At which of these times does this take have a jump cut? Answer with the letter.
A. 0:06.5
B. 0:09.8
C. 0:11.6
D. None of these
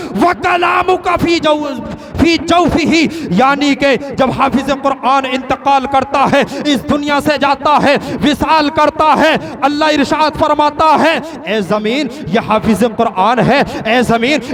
D